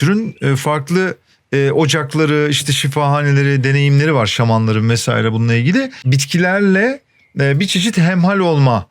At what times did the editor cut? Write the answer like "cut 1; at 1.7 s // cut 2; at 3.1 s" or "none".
cut 1; at 6.1 s